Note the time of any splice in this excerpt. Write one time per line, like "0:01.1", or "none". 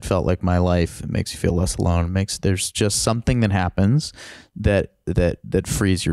none